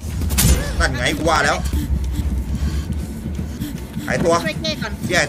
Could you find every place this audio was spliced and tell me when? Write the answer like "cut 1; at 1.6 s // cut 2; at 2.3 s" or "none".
none